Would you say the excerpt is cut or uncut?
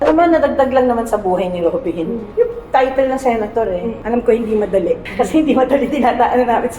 cut